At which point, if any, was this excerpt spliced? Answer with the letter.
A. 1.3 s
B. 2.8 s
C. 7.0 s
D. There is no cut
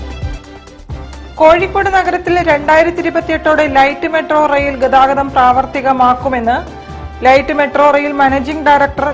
D